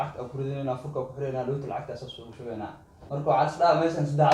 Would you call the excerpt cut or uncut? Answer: cut